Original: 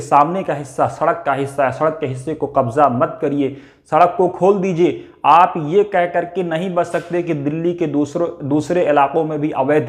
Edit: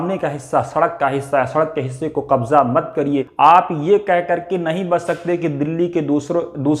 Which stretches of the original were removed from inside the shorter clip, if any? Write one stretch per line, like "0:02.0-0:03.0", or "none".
0:03.5-0:05.1